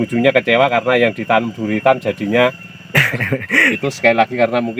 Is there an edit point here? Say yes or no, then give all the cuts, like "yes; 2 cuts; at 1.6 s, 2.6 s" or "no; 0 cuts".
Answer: yes; 1 cut; at 3.8 s